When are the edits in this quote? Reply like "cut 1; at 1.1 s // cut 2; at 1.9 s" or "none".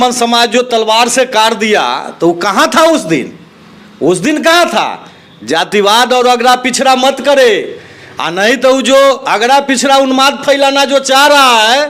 none